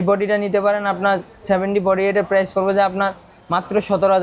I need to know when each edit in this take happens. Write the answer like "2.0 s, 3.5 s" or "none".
none